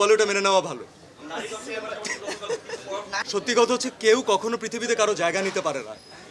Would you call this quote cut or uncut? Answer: cut